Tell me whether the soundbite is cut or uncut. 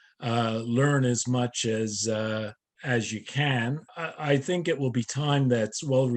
cut